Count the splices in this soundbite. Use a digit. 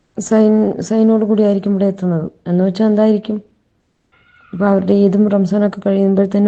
0